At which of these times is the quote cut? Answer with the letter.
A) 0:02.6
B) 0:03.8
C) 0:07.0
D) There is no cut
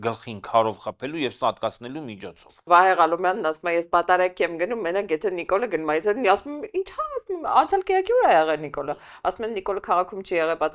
A